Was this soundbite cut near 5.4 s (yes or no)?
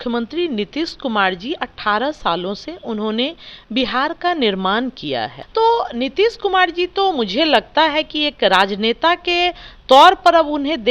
yes